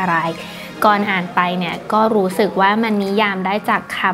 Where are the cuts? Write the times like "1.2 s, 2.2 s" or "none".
none

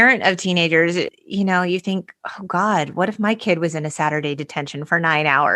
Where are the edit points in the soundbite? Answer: 1.1 s

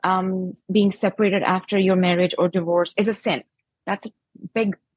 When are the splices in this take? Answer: none

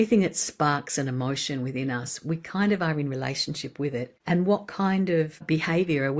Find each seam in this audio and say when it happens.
4.1 s, 5.4 s

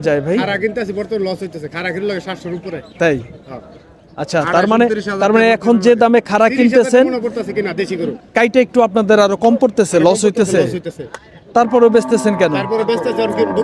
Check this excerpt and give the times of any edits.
none

